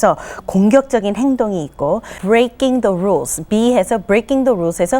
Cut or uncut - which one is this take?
cut